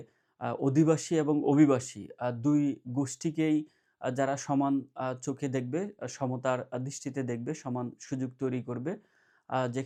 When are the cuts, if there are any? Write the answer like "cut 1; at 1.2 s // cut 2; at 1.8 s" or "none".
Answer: none